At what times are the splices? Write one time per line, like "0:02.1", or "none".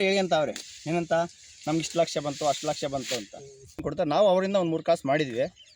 0:03.8